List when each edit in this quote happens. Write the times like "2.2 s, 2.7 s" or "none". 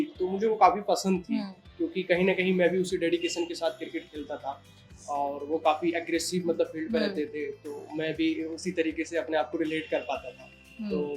none